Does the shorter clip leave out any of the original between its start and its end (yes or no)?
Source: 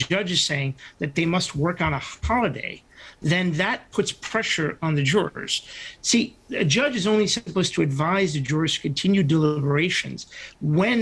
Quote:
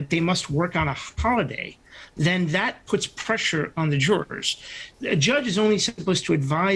yes